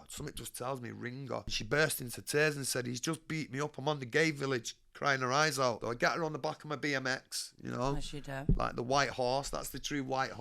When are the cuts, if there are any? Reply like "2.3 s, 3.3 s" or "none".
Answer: 1.6 s, 5.8 s

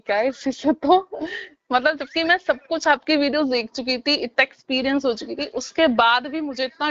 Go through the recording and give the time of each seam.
none

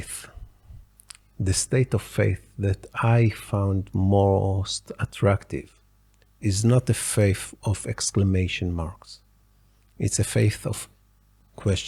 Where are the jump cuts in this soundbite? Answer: none

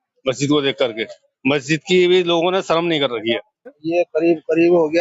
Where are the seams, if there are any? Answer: 3.7 s

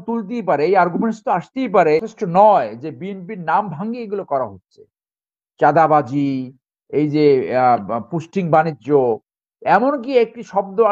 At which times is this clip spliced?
2.2 s

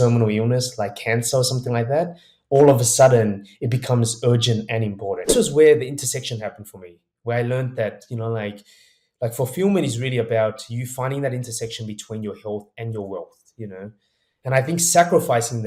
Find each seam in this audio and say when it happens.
5.3 s

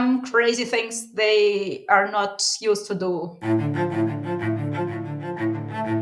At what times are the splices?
3.3 s

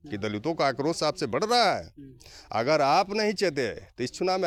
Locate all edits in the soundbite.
none

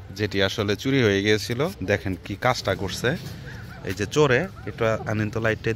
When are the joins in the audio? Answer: 1.8 s

